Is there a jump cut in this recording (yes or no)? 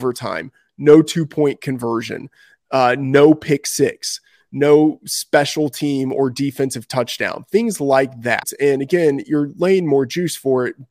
yes